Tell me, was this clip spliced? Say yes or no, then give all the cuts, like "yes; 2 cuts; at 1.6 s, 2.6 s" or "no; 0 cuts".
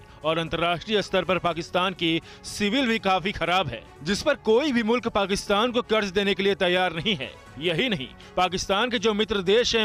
no; 0 cuts